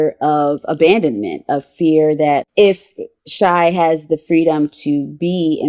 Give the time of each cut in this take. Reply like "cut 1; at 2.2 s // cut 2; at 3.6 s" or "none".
cut 1; at 2.5 s